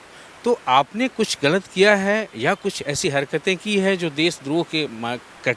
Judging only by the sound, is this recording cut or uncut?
uncut